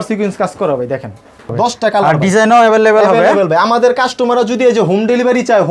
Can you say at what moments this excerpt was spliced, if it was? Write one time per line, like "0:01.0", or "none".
0:01.5